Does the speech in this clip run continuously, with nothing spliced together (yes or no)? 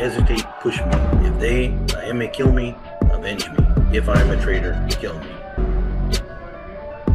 yes